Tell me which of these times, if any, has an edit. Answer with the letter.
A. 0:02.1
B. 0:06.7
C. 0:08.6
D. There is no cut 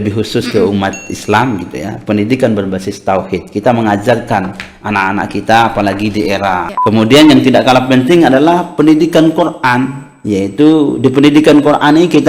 B